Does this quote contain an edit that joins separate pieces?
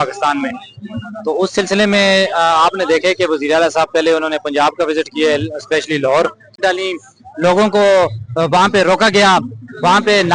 yes; 1 cut; at 6.5 s

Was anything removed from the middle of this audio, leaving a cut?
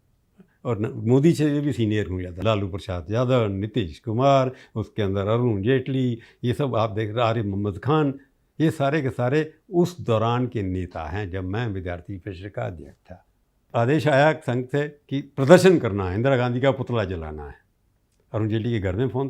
yes; 2 cuts; at 2.4 s, 13.7 s

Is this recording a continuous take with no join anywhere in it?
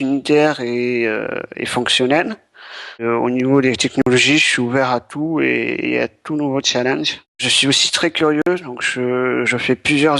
no; 2 cuts; at 3.0 s, 7.4 s

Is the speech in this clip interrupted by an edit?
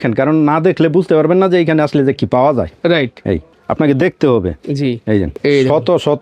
no; 0 cuts

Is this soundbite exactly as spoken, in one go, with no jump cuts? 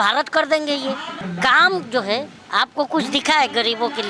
no; 2 cuts; at 1.2 s, 2.4 s

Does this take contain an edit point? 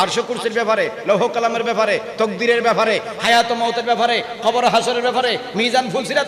no; 0 cuts

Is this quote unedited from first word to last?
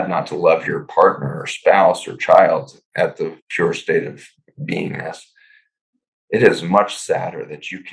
yes; 0 cuts

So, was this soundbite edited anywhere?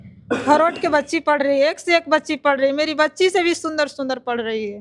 no; 0 cuts

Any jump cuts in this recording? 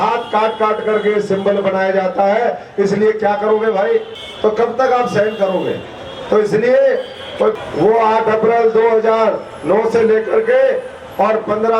yes; 2 cuts; at 4.2 s, 7.6 s

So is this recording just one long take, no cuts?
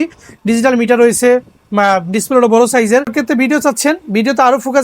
no; 1 cut; at 3.1 s

